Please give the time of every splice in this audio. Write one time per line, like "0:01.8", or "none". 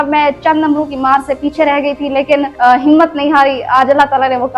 0:02.5